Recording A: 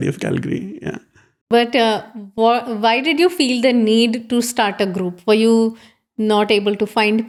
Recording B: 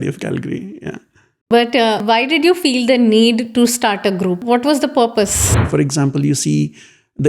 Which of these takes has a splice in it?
B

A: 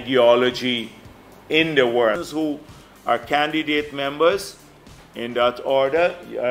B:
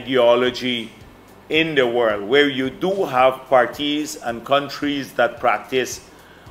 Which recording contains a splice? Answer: A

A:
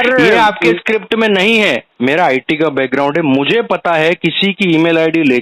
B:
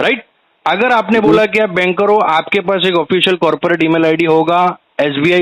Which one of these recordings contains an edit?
A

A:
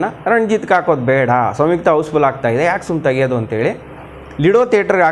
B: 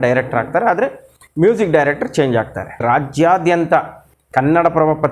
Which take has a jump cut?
B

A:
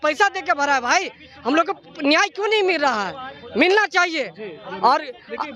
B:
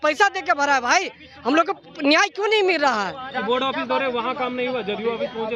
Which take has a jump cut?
B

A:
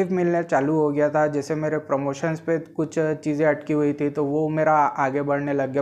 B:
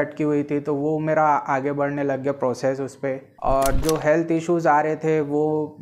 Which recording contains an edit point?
B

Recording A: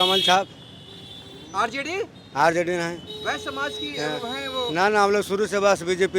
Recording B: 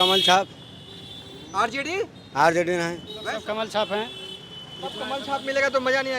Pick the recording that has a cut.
B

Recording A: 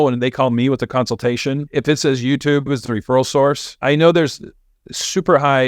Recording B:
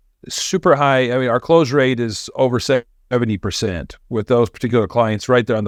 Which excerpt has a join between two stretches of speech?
A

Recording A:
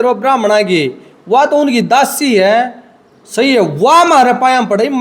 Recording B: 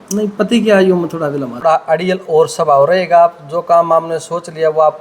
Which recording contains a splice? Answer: B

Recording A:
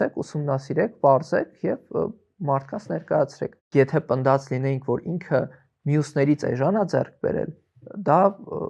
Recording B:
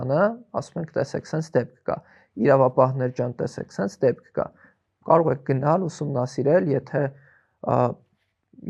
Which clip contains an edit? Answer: A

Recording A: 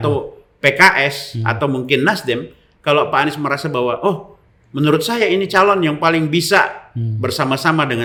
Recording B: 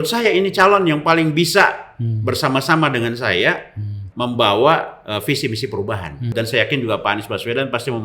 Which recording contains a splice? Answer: B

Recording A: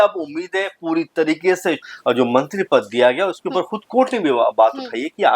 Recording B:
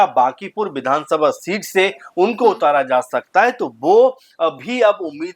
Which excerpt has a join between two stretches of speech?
A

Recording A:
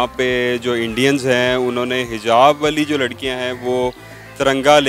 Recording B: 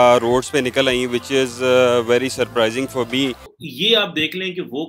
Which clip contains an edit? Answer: B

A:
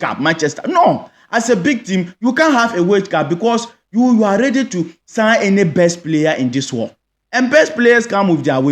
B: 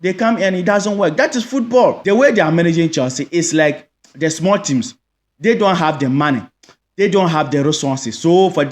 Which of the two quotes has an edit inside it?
B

